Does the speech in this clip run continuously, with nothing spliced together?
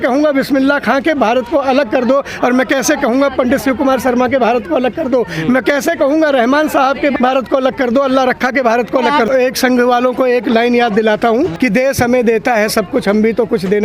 no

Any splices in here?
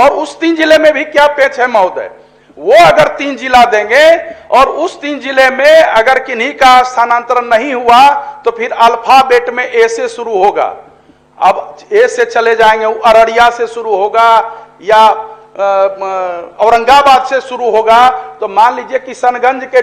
no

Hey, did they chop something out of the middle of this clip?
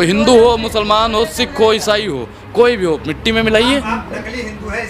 no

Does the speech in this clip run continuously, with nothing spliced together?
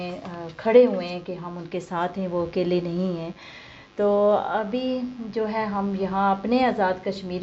yes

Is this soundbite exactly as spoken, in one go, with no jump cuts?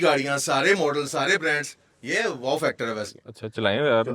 no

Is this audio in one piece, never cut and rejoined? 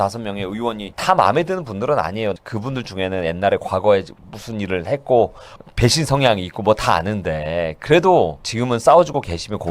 no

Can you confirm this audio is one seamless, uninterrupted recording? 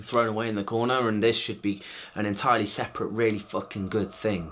yes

